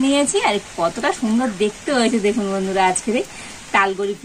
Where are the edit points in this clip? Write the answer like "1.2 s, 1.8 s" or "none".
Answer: none

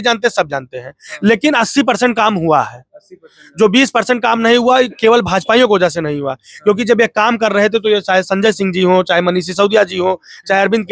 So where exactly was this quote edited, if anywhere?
none

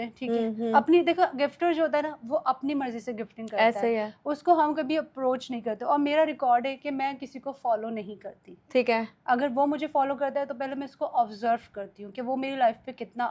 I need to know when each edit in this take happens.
none

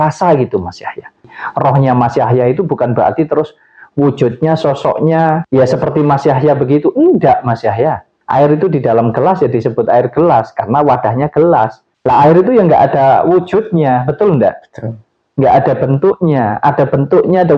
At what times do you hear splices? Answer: 1.4 s, 8.1 s

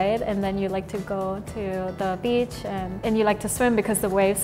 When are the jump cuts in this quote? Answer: none

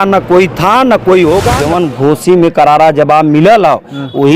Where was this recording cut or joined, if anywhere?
1.6 s

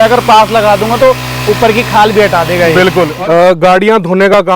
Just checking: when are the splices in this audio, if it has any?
3.1 s

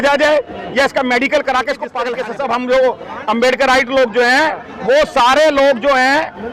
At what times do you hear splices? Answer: 2.1 s

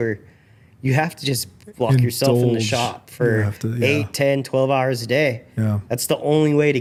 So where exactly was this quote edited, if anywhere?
none

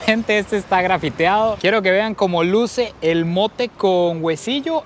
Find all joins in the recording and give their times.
1.6 s

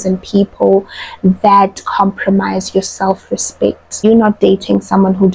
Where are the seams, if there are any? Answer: 4.0 s

